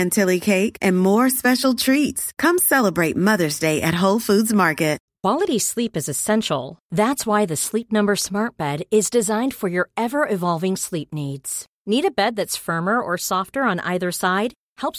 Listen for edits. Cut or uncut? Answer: cut